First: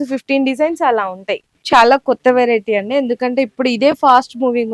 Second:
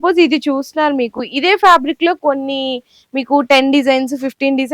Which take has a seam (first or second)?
first